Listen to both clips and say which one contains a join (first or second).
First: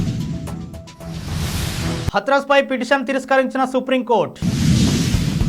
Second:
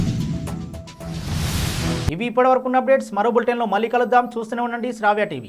first